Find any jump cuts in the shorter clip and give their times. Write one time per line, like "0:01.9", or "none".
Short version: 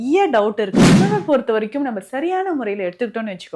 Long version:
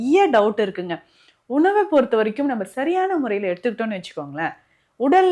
0:01.0